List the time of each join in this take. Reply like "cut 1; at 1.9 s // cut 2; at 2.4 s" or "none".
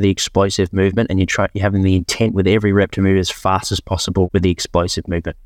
cut 1; at 4.3 s